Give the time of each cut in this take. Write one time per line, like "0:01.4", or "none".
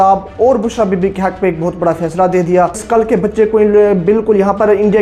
0:02.8